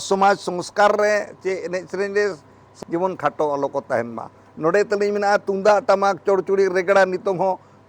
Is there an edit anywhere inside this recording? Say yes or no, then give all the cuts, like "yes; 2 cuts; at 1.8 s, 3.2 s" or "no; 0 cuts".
yes; 1 cut; at 2.7 s